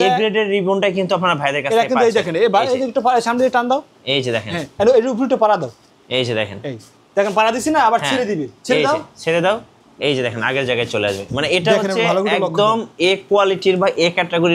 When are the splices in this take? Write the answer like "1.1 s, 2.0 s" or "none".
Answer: none